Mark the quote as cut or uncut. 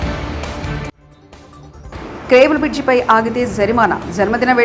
uncut